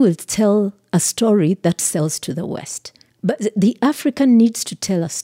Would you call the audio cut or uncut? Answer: cut